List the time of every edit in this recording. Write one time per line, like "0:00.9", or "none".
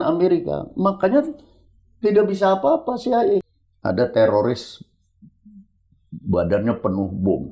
0:03.4

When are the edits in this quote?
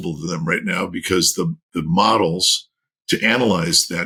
none

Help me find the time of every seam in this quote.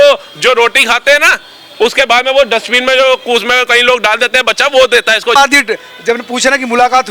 0:05.4

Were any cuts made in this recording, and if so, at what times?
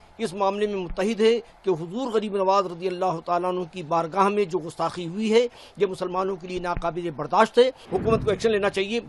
0:07.8

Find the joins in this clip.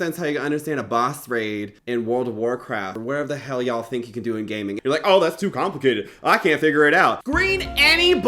0:01.7
0:04.8
0:07.2

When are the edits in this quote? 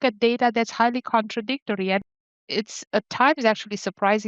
0:02.2

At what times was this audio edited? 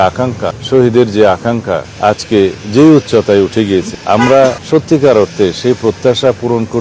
none

